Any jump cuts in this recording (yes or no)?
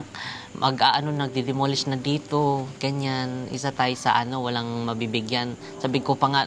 no